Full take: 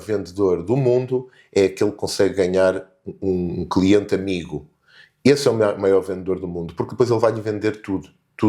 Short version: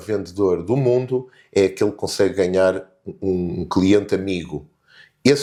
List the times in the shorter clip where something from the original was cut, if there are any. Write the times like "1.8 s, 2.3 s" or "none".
none